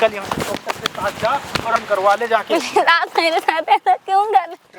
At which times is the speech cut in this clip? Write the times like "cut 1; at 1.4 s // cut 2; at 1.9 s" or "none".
cut 1; at 1.8 s

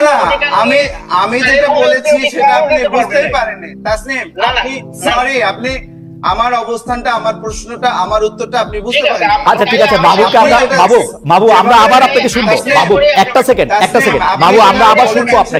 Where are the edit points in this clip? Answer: none

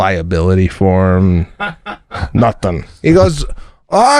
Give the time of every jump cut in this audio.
cut 1; at 2.9 s

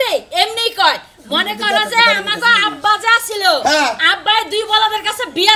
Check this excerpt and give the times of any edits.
none

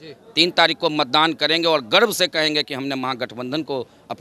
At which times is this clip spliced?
none

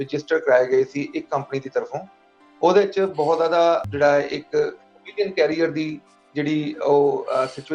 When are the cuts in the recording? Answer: cut 1; at 3.9 s

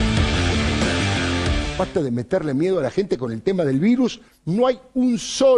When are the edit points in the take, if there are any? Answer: none

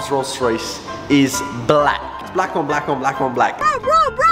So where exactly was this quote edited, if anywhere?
cut 1; at 2.2 s // cut 2; at 3.5 s

